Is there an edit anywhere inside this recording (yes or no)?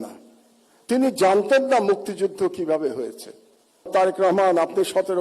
yes